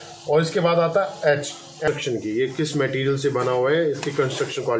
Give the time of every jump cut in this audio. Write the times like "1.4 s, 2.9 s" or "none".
1.8 s

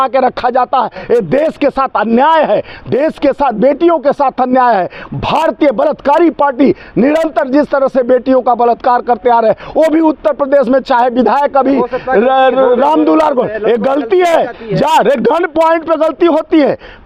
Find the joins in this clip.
none

